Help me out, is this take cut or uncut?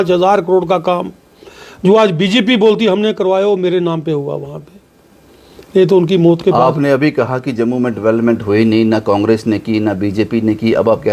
uncut